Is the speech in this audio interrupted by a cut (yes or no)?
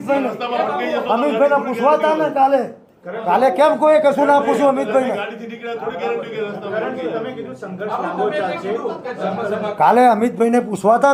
no